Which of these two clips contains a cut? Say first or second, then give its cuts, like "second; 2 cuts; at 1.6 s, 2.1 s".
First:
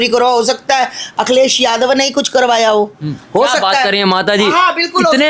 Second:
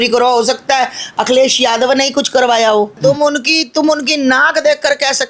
second; 1 cut; at 3.0 s